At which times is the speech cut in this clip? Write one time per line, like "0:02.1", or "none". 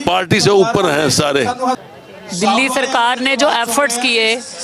0:01.8